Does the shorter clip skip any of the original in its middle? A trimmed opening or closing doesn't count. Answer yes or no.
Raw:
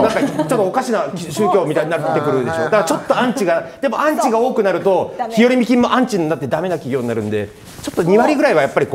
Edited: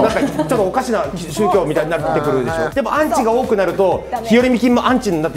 yes